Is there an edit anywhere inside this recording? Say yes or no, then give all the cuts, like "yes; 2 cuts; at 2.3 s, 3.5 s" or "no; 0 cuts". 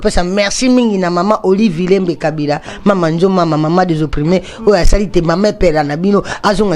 no; 0 cuts